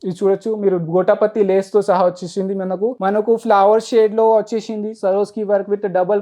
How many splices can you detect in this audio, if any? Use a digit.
1